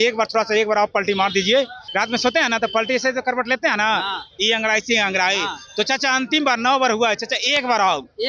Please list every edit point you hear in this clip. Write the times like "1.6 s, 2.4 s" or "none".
1.8 s